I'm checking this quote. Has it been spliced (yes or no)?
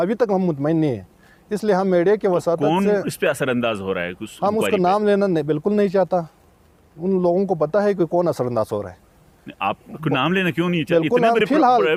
no